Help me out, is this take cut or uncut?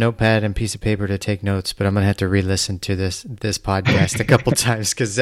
uncut